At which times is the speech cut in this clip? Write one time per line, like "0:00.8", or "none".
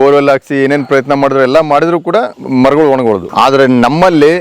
0:02.4
0:03.3